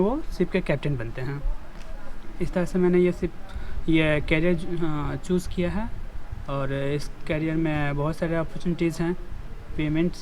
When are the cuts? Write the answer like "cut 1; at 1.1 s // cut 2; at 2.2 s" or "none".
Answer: none